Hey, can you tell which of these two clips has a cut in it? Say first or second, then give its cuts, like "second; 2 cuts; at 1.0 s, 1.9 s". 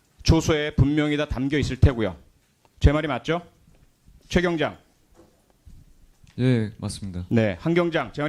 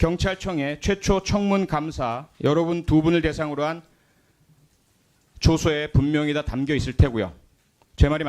second; 1 cut; at 1.3 s